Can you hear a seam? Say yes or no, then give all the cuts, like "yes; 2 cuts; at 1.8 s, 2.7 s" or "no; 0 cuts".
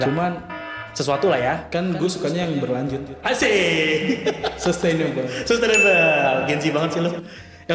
no; 0 cuts